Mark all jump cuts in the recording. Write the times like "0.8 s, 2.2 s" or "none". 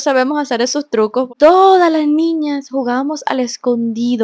1.3 s